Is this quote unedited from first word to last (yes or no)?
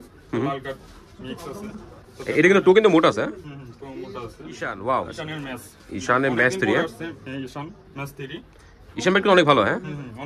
no